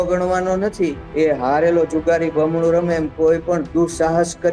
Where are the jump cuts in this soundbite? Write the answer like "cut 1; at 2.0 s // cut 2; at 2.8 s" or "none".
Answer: cut 1; at 1.0 s